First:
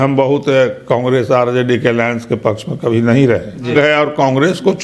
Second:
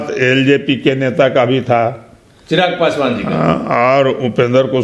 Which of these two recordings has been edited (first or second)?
first